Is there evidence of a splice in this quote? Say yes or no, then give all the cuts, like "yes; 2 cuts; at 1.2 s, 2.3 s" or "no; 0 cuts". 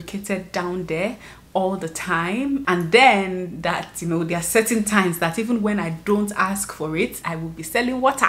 yes; 2 cuts; at 2.6 s, 7.2 s